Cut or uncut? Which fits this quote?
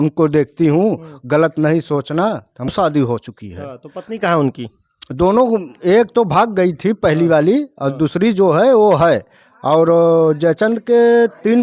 cut